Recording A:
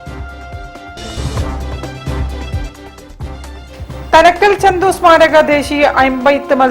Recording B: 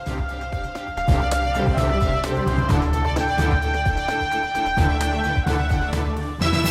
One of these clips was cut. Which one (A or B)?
A